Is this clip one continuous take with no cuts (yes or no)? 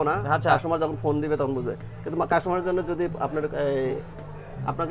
yes